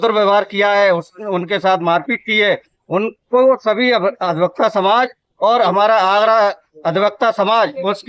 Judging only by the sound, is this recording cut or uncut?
uncut